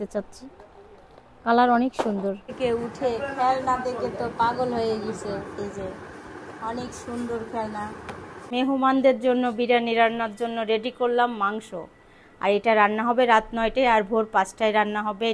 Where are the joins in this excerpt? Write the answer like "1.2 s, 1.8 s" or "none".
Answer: 2.5 s, 8.3 s